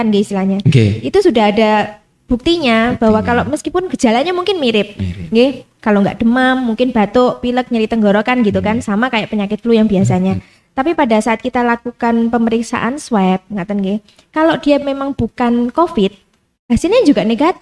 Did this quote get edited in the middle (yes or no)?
no